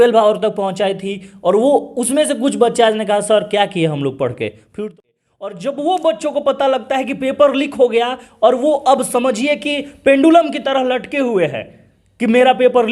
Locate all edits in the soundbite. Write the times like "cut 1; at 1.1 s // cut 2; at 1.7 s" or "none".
cut 1; at 4.9 s